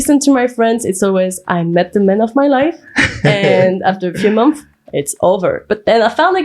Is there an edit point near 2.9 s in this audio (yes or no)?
no